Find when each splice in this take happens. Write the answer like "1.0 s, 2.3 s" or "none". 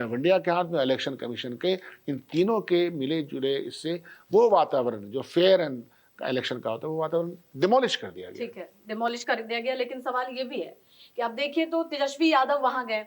none